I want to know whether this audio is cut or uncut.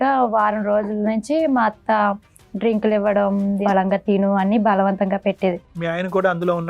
cut